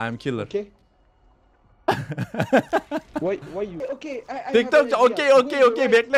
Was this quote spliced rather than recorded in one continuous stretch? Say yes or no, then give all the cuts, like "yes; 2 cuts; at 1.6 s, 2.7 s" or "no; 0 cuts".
yes; 1 cut; at 3.7 s